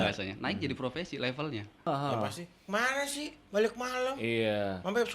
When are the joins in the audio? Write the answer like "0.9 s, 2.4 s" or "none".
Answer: 1.9 s